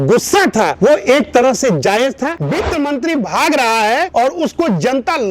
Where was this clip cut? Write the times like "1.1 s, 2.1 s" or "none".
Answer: 2.4 s